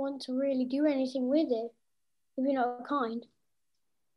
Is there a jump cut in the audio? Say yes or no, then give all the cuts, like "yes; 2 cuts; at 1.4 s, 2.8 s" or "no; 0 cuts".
no; 0 cuts